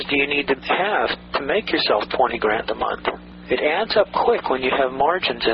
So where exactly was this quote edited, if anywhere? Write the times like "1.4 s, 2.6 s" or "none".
3.3 s